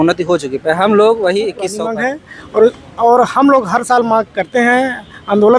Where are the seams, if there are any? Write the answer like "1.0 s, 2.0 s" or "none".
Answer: 1.7 s